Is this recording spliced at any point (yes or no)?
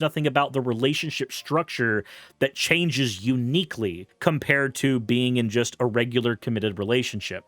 yes